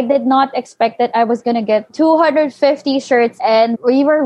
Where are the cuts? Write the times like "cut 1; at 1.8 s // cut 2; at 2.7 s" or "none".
cut 1; at 1.9 s // cut 2; at 3.5 s

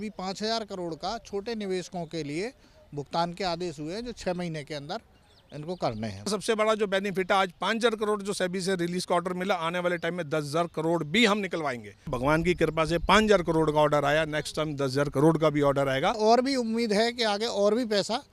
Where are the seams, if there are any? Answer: cut 1; at 6.3 s // cut 2; at 12.2 s // cut 3; at 16.2 s

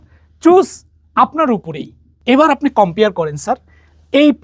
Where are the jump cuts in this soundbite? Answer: cut 1; at 2.2 s

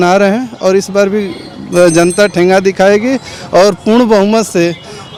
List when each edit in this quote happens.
none

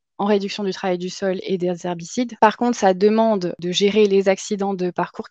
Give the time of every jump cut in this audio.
cut 1; at 2.3 s // cut 2; at 3.6 s

